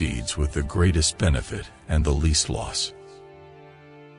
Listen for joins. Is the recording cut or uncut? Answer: cut